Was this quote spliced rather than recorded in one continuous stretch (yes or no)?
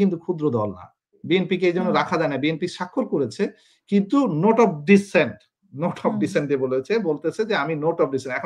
yes